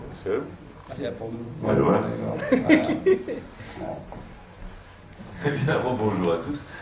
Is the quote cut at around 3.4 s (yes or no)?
yes